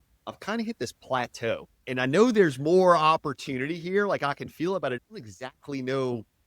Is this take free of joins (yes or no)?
no